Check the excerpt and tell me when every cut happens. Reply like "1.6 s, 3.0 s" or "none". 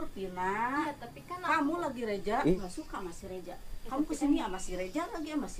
2.7 s